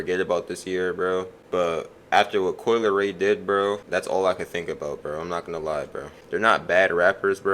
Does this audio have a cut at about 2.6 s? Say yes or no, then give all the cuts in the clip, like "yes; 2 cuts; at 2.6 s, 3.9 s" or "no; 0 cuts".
no; 3 cuts; at 1.4 s, 3.8 s, 6.2 s